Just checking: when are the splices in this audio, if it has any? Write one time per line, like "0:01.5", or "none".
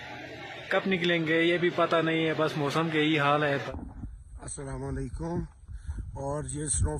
0:03.7